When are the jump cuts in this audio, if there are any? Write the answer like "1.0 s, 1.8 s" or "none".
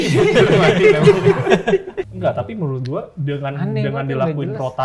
2.1 s